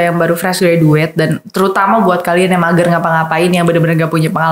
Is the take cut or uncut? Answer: uncut